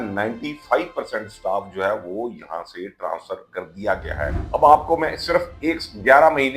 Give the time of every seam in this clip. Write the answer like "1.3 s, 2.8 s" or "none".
4.4 s